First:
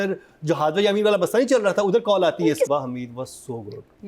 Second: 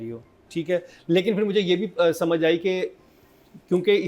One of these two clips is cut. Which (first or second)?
first